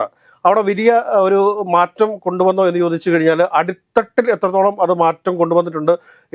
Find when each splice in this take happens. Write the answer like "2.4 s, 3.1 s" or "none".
none